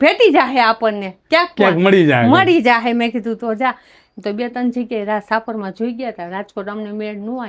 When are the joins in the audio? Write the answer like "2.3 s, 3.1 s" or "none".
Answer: none